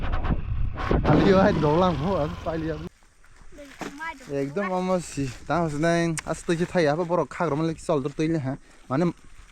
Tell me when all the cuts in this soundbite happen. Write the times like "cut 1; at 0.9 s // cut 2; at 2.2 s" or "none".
cut 1; at 2.9 s